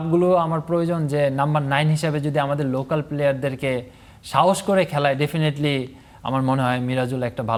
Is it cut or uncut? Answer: uncut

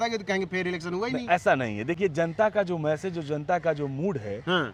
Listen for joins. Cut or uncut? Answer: uncut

